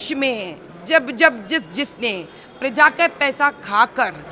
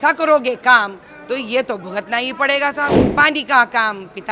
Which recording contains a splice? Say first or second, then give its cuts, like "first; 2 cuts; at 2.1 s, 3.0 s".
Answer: second; 1 cut; at 3.0 s